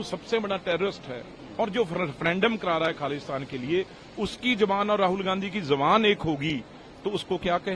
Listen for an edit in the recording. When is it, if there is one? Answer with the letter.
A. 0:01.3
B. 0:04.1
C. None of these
C